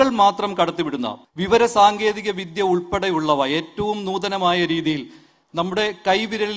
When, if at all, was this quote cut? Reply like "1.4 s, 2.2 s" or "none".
1.1 s